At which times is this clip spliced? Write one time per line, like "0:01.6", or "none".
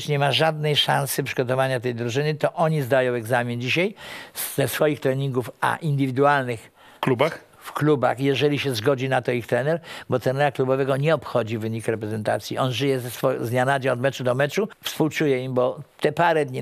0:14.8

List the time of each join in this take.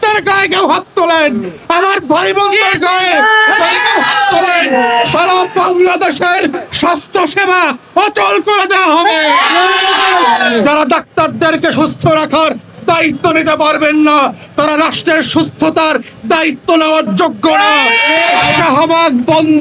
0:10.6
0:18.6

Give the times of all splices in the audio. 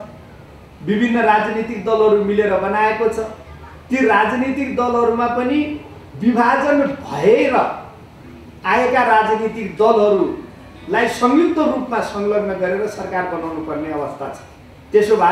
none

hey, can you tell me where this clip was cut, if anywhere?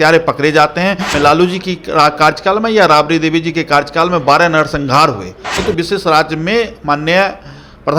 0:01.1
0:05.6

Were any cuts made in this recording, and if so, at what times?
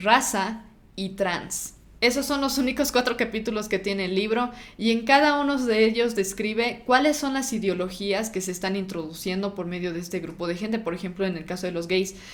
none

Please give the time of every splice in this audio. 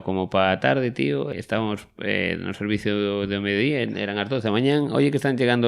0:01.3

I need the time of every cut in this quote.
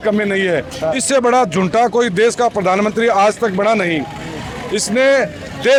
none

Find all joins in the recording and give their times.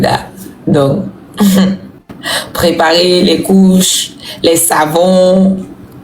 none

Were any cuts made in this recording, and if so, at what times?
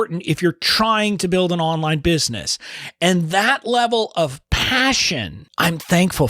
0:05.4

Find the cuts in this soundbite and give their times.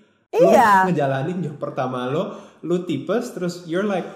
none

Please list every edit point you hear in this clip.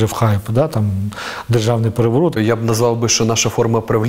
0:02.4

